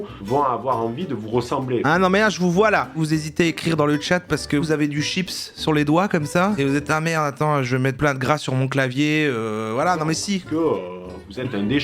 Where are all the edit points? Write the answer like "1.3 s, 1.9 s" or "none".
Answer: 3.0 s, 4.6 s, 6.6 s